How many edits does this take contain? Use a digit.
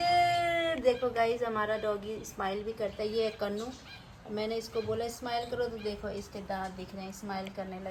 0